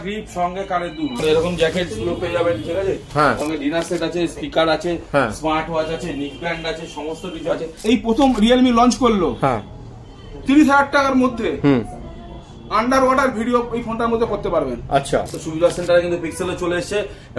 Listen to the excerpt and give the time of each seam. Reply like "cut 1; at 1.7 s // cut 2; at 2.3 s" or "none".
cut 1; at 1.2 s // cut 2; at 3.4 s // cut 3; at 7.7 s // cut 4; at 15.4 s